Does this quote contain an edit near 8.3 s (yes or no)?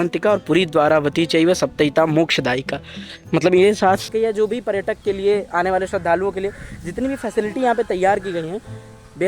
no